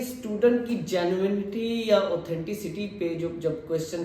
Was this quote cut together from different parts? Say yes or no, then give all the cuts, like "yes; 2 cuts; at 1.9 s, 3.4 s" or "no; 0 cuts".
no; 0 cuts